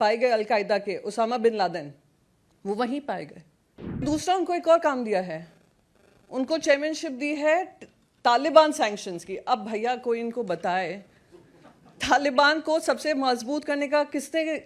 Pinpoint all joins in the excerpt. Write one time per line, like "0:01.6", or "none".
0:04.0